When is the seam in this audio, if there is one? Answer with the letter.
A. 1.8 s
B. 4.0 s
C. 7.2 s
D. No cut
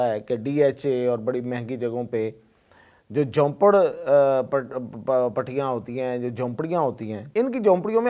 C